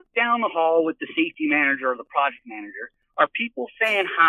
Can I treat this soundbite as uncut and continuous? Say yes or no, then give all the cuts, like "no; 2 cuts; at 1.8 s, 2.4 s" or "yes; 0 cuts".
yes; 0 cuts